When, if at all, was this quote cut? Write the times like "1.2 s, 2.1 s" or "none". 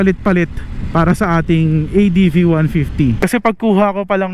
3.2 s